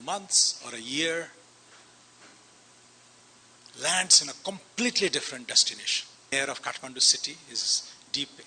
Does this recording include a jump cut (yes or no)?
yes